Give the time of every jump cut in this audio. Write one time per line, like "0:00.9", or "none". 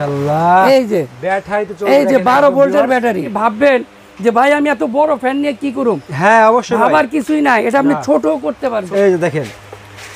0:03.3
0:08.8